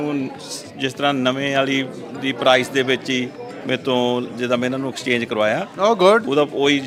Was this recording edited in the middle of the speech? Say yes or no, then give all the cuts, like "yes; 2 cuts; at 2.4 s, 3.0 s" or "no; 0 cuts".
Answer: no; 0 cuts